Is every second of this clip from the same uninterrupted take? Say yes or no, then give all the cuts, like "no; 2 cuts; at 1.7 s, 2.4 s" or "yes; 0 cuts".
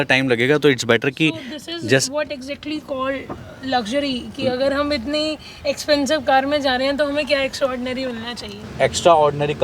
no; 1 cut; at 8.6 s